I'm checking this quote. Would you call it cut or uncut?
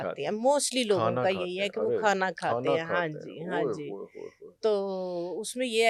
uncut